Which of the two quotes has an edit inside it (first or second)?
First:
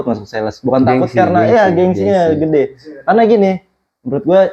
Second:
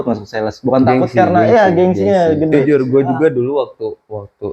second